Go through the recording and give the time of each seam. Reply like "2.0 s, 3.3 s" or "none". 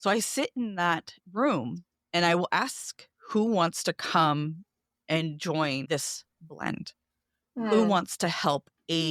5.9 s